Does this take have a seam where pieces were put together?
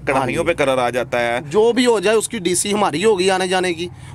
no; 0 cuts

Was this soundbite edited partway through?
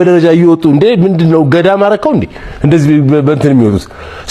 no; 0 cuts

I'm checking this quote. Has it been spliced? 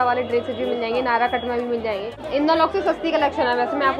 yes; 1 cut; at 2.1 s

